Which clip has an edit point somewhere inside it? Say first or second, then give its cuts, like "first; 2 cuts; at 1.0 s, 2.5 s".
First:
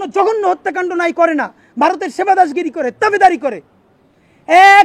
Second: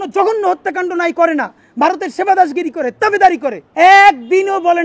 second; 1 cut; at 3.6 s